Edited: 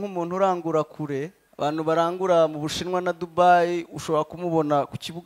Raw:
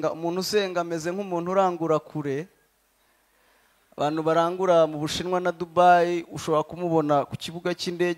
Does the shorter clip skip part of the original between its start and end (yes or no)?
yes